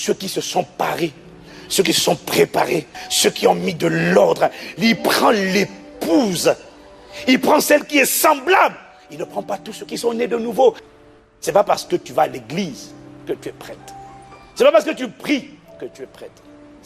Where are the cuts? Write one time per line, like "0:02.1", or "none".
0:03.0
0:10.9